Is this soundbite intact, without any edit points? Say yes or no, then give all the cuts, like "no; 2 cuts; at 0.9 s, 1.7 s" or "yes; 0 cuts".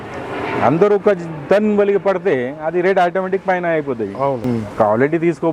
no; 1 cut; at 4.4 s